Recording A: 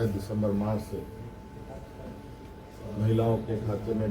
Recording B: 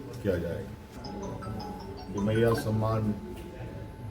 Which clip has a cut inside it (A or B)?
B